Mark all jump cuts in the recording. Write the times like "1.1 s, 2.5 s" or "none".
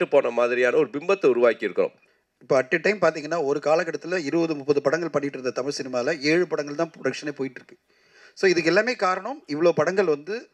2.0 s